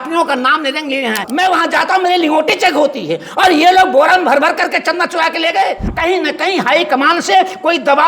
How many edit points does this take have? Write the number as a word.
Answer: two